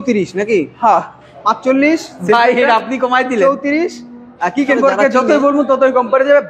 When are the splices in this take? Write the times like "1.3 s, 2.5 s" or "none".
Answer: 4.8 s